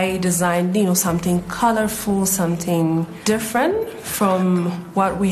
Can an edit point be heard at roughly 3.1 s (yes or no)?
yes